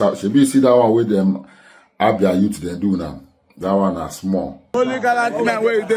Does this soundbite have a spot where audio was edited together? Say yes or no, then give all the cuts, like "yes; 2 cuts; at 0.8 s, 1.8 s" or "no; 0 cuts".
yes; 1 cut; at 4.6 s